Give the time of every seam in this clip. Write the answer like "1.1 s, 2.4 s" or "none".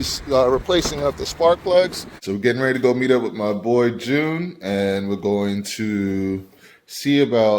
2.2 s